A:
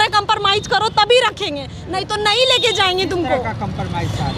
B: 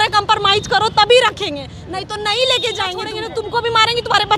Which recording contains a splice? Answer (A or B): B